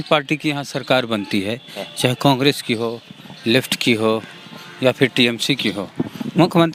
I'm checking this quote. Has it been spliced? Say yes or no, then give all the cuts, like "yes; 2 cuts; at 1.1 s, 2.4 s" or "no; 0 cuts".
no; 0 cuts